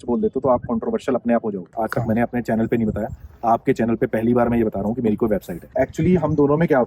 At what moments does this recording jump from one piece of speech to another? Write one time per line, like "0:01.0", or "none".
0:01.7
0:05.5